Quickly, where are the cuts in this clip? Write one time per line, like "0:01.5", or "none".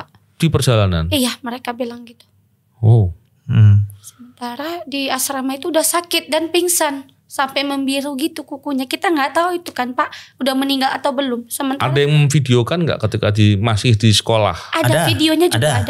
none

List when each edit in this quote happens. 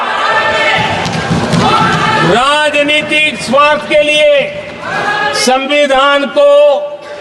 none

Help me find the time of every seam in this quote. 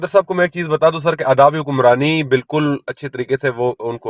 none

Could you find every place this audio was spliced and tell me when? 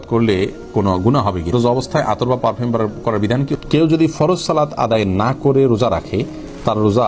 0:01.5
0:03.5

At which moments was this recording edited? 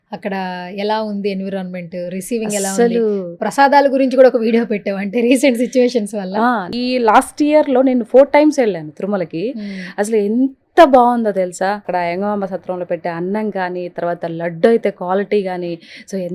0:06.7
0:11.9

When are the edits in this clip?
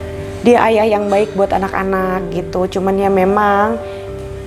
none

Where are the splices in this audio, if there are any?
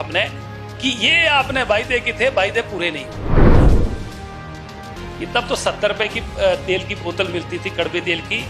0:05.0

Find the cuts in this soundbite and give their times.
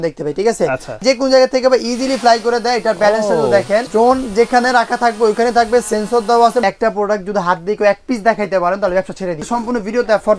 0:01.0
0:03.9
0:06.6
0:09.4

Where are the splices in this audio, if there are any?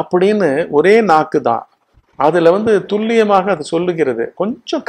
none

